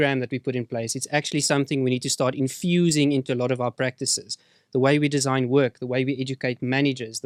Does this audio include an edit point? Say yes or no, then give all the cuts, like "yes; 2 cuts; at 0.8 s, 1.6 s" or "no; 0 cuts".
no; 0 cuts